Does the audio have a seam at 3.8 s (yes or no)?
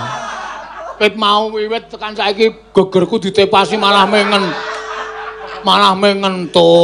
no